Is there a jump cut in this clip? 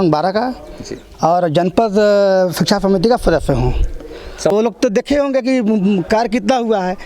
yes; 1 cut; at 4.5 s

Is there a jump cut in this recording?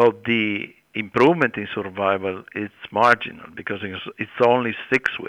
yes; 2 cuts; at 0.9 s, 2.8 s

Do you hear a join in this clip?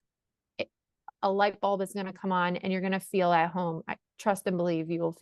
yes; 1 cut; at 1.1 s

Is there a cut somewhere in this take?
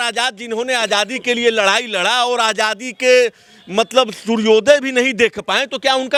no; 0 cuts

